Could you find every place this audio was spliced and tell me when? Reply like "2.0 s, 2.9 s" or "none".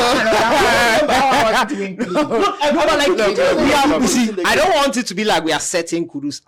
none

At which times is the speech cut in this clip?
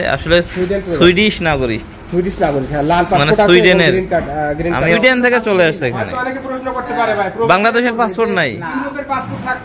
4.9 s

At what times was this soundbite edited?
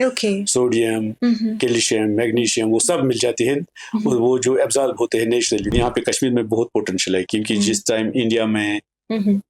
5.7 s

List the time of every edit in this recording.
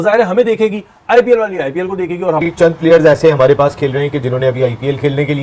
none

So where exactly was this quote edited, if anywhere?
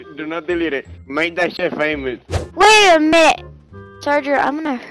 2.3 s

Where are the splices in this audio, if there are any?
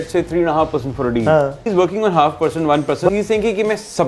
1.7 s, 3.1 s

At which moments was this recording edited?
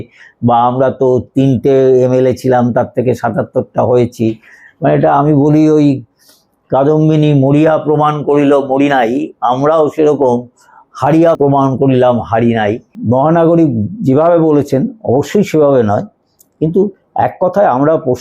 11.4 s, 12.9 s

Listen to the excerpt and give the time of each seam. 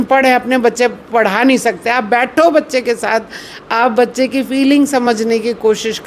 none

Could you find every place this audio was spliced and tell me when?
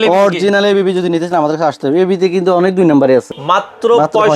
3.3 s

